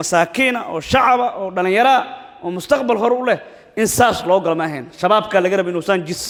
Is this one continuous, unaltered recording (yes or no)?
yes